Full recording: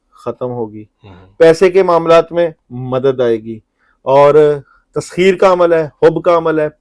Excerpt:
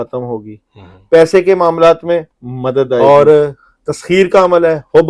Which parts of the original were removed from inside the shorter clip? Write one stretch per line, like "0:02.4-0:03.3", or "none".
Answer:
0:03.3-0:04.1